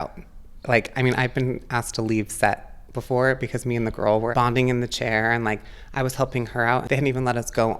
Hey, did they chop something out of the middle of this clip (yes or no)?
yes